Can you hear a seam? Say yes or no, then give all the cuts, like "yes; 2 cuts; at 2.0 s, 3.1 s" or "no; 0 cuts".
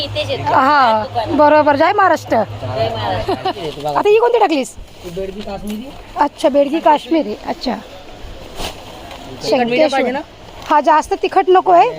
yes; 1 cut; at 3.6 s